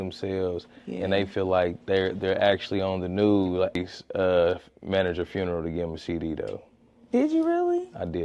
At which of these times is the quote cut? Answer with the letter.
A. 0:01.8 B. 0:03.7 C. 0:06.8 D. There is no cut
B